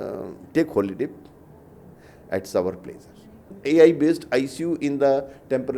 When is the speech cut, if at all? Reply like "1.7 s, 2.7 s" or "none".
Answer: 3.5 s